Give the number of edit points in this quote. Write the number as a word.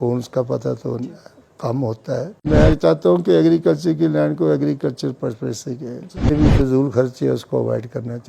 two